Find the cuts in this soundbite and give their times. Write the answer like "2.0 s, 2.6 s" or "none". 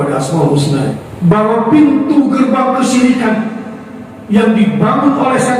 1.1 s